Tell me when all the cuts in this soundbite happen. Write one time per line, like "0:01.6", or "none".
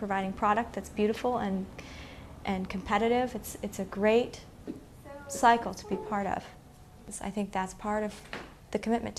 none